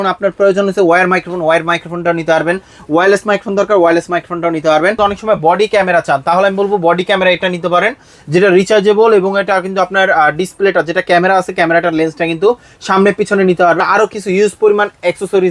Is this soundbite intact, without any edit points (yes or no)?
no